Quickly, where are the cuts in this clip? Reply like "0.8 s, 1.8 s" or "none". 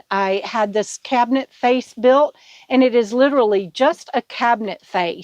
none